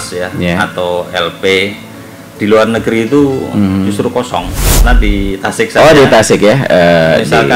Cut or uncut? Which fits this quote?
cut